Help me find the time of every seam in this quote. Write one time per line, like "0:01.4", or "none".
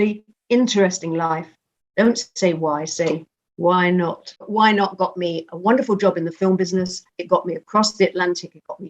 0:04.4